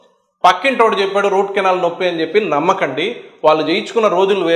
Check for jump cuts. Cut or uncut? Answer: uncut